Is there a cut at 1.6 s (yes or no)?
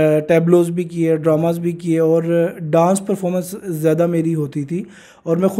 no